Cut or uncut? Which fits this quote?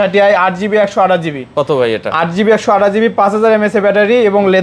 uncut